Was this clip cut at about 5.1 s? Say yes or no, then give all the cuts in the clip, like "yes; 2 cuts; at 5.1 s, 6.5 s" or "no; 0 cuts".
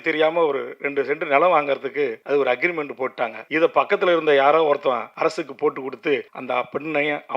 yes; 4 cuts; at 2.2 s, 3.4 s, 5.1 s, 6.3 s